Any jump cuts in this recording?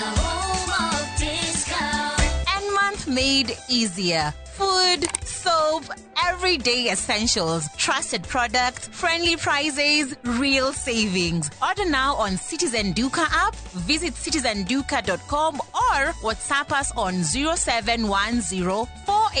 yes; 1 cut; at 1.9 s

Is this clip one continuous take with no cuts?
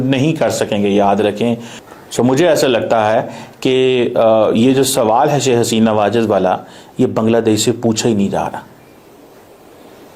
no; 1 cut; at 2.1 s

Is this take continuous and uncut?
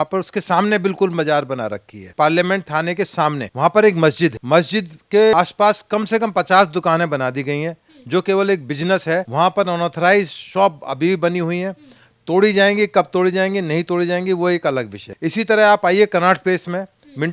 no; 6 cuts; at 2.1 s, 3.5 s, 4.4 s, 5.3 s, 9.3 s, 15.0 s

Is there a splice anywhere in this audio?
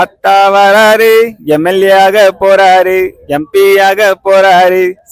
no; 0 cuts

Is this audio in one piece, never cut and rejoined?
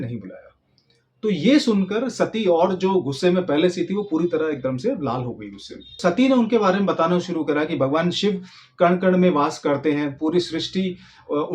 no; 1 cut; at 6.0 s

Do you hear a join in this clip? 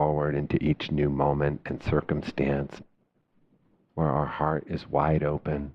yes; 1 cut; at 2.8 s

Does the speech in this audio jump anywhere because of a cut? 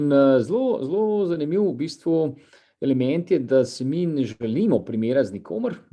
no; 0 cuts

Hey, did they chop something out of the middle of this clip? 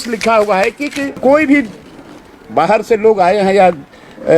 yes; 1 cut; at 1.2 s

